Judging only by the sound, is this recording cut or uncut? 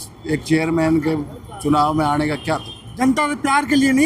cut